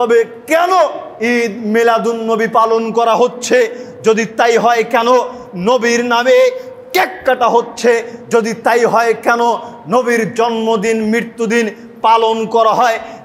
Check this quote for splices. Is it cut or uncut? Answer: uncut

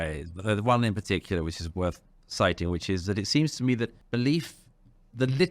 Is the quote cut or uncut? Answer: cut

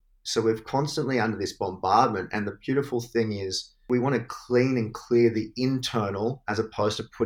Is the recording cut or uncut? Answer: cut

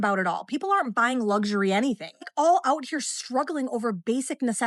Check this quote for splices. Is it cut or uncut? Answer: uncut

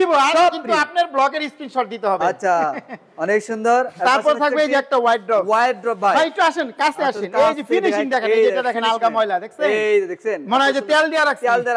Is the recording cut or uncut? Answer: uncut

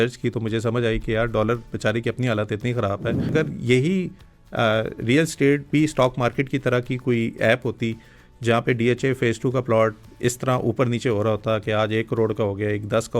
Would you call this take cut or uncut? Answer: cut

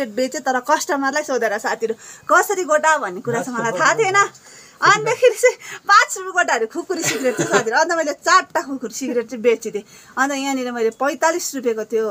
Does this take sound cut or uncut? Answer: uncut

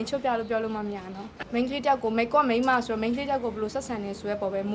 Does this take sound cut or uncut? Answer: cut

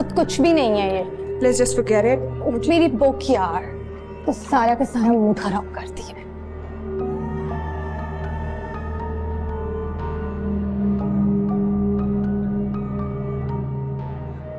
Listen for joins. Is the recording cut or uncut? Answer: uncut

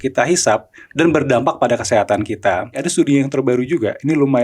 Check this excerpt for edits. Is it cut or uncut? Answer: cut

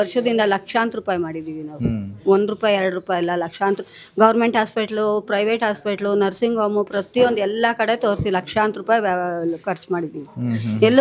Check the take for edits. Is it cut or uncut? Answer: uncut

